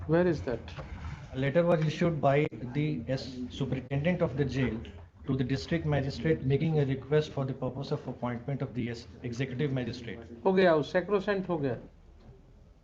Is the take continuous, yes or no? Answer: no